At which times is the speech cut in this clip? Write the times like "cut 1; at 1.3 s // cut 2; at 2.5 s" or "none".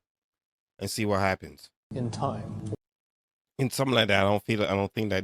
cut 1; at 1.8 s